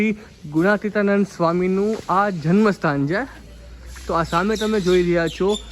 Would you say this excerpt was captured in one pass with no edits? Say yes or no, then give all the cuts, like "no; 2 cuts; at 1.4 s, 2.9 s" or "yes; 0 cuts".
yes; 0 cuts